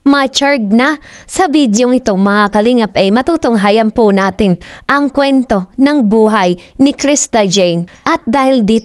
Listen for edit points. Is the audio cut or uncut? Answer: cut